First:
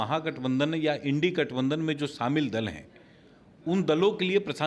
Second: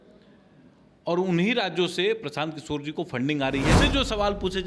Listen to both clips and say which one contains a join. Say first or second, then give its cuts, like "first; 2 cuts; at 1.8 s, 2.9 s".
second; 1 cut; at 3.8 s